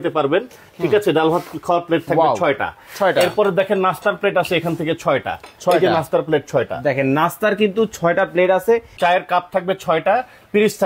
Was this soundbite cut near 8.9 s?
yes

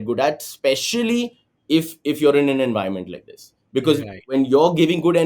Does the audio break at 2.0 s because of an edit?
no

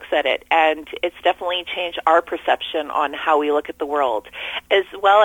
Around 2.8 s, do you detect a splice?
no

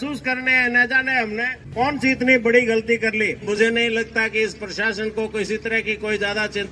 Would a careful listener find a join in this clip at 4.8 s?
no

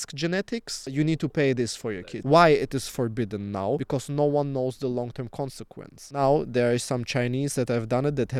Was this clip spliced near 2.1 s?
yes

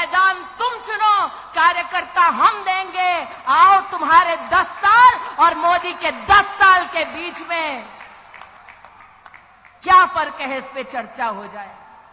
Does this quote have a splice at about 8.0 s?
no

